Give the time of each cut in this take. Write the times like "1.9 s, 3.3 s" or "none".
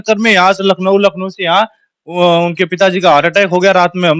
none

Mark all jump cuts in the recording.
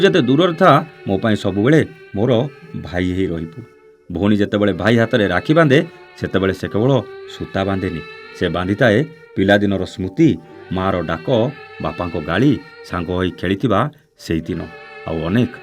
none

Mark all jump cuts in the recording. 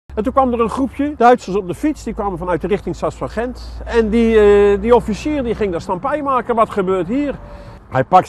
1.1 s

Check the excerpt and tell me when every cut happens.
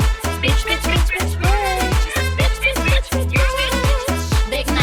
none

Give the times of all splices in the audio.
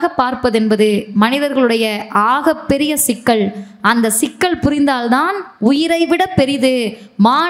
none

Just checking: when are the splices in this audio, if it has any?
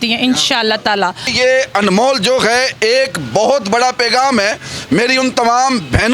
1.3 s

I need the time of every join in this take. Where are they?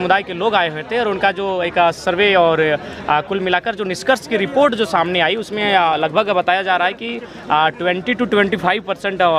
none

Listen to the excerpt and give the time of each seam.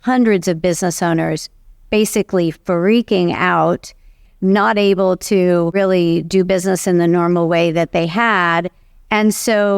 4.2 s, 5.7 s

